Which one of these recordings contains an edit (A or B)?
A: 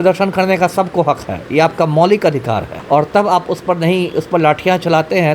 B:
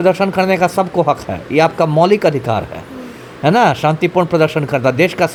A